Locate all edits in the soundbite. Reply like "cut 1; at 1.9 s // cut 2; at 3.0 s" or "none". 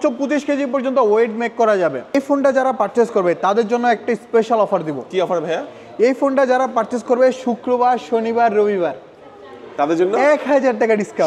cut 1; at 2.1 s